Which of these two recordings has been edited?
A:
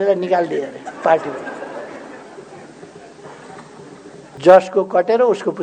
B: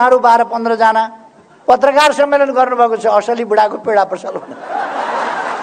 A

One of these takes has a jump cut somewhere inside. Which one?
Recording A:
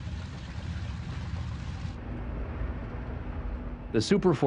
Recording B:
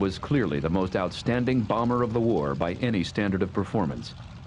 B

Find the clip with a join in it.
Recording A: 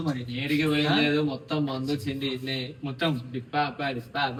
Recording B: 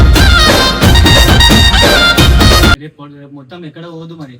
B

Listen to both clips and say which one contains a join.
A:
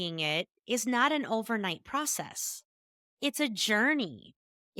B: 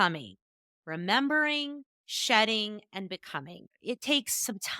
B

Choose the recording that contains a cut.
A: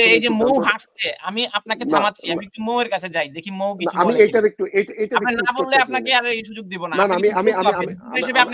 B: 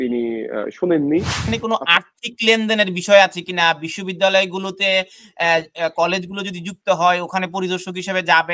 B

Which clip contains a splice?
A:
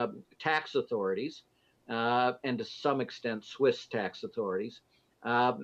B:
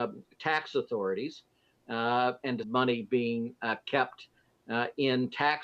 A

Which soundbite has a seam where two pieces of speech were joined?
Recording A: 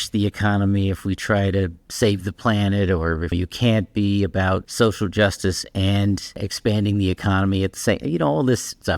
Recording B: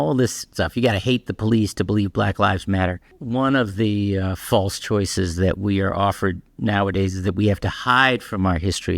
A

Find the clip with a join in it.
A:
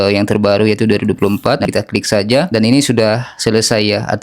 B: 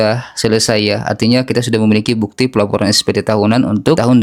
A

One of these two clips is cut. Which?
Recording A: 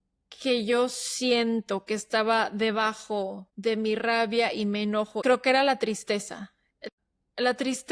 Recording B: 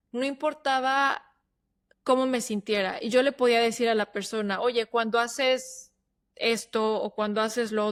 A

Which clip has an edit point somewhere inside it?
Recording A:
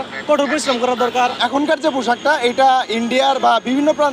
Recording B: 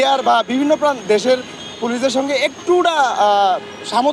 A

